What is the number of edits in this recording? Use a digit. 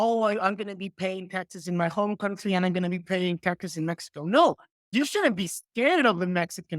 1